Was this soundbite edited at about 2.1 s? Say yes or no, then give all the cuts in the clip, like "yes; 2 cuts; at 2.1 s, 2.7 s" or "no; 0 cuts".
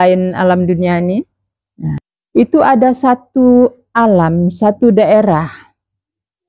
yes; 1 cut; at 2.1 s